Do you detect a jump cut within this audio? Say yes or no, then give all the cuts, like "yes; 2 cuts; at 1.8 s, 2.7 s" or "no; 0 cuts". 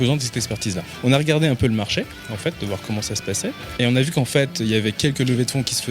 yes; 3 cuts; at 0.9 s, 2.3 s, 3.6 s